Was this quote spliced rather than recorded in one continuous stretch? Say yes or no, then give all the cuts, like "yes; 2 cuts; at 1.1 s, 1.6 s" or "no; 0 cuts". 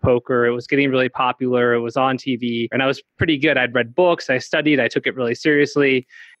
yes; 1 cut; at 2.7 s